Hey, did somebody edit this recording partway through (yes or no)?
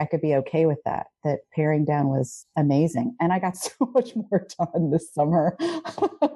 no